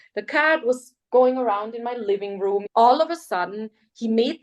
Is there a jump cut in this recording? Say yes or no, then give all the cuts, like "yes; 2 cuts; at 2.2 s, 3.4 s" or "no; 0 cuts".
yes; 1 cut; at 2.7 s